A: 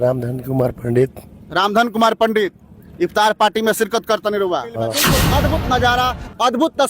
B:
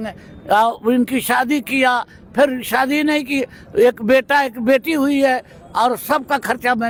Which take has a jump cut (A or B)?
A